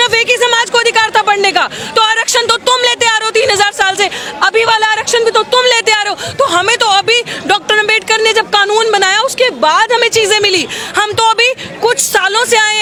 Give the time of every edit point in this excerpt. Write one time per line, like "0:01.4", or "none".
none

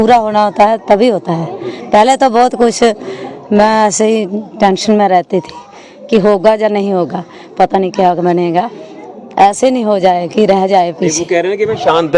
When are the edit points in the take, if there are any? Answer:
none

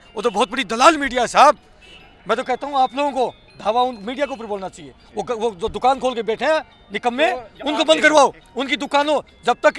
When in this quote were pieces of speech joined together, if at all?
none

